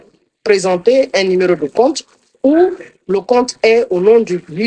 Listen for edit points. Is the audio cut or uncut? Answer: uncut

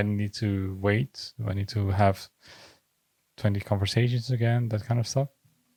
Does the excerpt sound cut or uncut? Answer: uncut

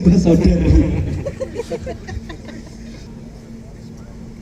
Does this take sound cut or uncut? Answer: cut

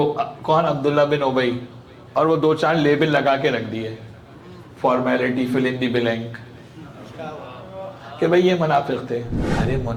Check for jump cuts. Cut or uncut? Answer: uncut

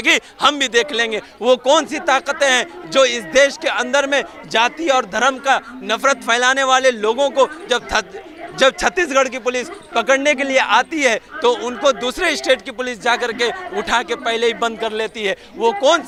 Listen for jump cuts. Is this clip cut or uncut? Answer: uncut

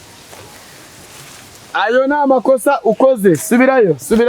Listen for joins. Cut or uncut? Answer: uncut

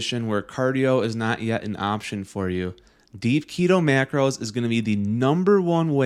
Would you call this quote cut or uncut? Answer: uncut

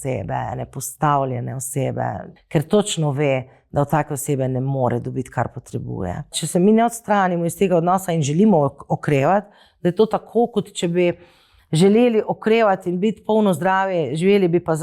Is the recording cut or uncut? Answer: cut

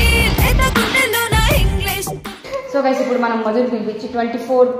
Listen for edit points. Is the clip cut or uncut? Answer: cut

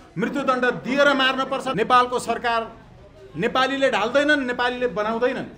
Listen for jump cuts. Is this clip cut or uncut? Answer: cut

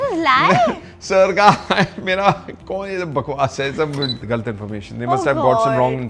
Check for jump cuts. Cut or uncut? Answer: cut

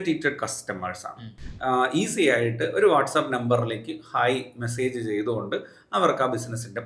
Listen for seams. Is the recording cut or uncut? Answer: cut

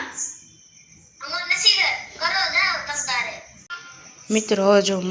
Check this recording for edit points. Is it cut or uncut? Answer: cut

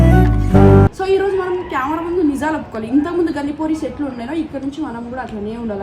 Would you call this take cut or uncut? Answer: cut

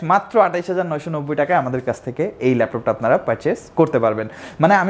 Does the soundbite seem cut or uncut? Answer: uncut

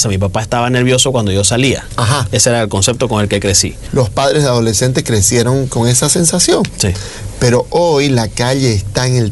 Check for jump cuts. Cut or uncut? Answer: cut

